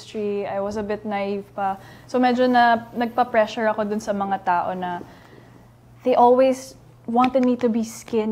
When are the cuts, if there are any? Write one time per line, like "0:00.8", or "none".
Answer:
none